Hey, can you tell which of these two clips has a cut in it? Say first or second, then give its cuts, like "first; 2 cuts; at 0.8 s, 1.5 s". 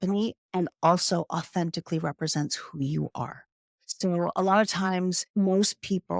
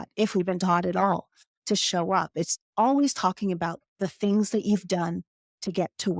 first; 1 cut; at 5.2 s